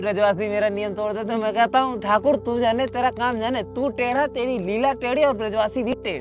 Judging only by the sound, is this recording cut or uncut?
uncut